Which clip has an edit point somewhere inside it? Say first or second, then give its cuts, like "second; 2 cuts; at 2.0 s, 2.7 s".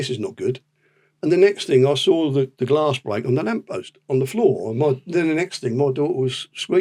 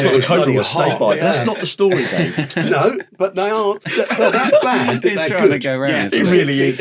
second; 1 cut; at 3.8 s